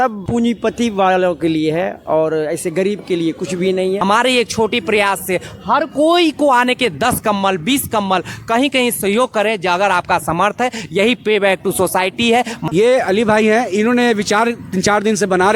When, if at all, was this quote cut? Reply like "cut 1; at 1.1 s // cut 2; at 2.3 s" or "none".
cut 1; at 4.0 s // cut 2; at 12.7 s

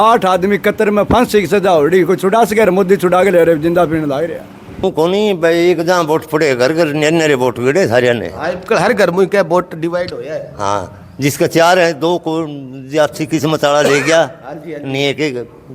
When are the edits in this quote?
cut 1; at 4.8 s

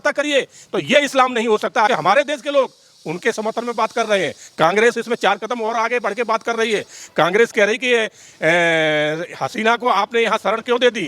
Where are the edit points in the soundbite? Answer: cut 1; at 1.9 s

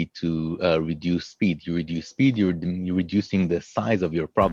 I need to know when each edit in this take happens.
none

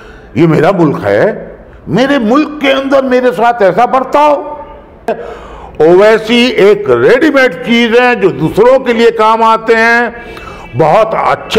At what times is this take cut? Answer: cut 1; at 5.1 s

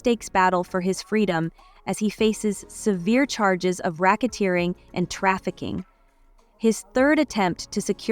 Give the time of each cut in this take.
cut 1; at 1.6 s

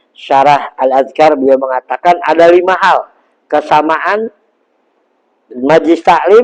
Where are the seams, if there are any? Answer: none

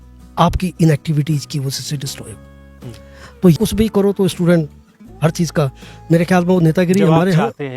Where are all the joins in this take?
cut 1; at 3.6 s

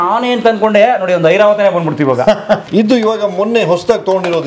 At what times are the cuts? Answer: cut 1; at 2.6 s

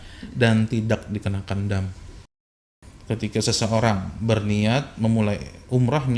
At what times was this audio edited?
cut 1; at 2.6 s

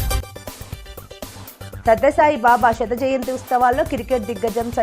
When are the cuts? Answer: cut 1; at 1.8 s

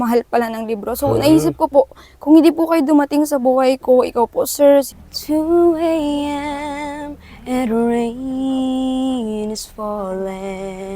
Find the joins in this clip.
cut 1; at 5.0 s

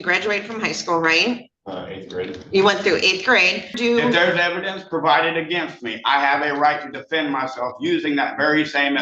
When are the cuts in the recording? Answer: cut 1; at 3.7 s

